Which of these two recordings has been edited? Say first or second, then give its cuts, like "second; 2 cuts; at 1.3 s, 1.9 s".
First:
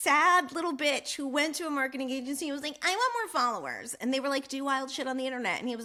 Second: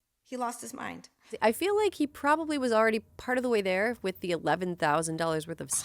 second; 1 cut; at 1.4 s